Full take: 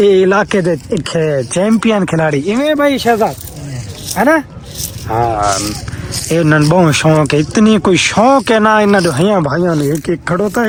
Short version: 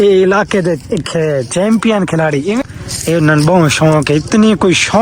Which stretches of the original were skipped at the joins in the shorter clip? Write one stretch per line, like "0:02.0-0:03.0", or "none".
0:02.6-0:05.9